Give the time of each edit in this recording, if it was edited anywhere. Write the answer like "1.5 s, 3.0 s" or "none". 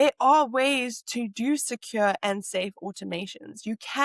none

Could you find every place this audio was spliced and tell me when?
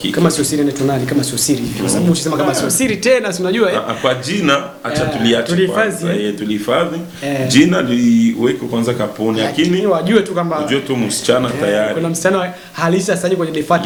none

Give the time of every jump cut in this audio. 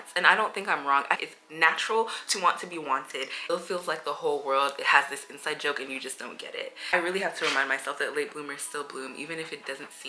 1.2 s, 3.5 s, 6.9 s

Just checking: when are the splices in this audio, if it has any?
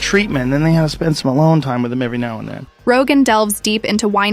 none

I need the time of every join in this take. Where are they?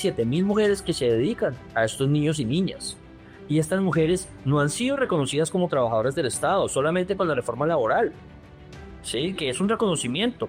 none

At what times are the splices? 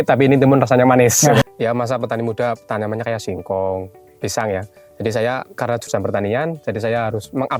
1.4 s, 5.5 s

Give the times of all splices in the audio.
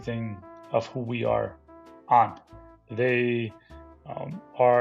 none

